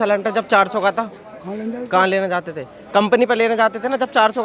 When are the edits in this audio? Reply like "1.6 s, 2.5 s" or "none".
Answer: none